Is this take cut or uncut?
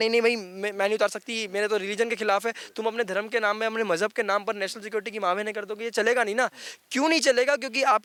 uncut